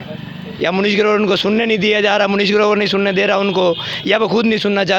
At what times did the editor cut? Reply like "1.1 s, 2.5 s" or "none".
none